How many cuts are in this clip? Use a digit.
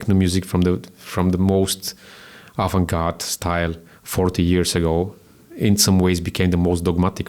0